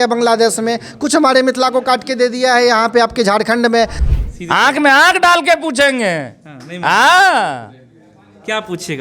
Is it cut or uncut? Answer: cut